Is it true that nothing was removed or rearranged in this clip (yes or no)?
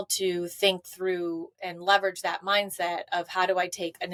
yes